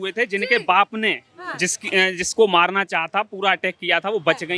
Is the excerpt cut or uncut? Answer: uncut